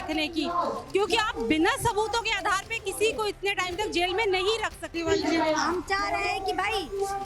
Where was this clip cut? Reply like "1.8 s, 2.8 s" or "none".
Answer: 4.9 s